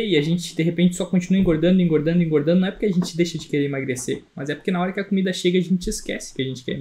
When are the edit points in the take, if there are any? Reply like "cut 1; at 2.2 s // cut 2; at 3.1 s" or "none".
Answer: none